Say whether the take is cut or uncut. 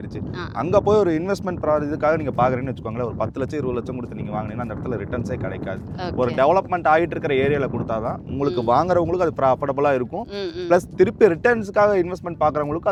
uncut